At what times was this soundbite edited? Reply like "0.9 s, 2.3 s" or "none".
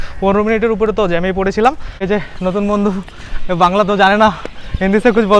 1.9 s